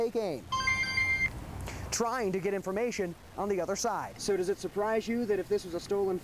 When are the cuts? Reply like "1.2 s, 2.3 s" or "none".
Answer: 4.1 s